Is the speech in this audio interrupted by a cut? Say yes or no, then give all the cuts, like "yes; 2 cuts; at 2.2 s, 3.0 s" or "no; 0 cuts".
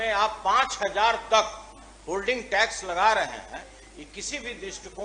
no; 0 cuts